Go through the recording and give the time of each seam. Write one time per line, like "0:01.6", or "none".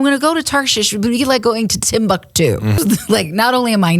0:02.8